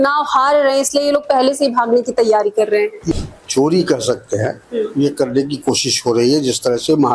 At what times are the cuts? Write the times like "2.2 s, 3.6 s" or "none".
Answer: 3.0 s